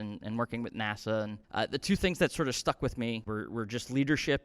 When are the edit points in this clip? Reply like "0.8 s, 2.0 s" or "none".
1.4 s, 3.3 s